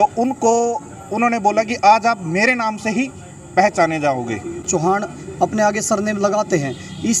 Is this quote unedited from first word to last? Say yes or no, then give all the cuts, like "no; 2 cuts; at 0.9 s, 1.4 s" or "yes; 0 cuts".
no; 1 cut; at 4.6 s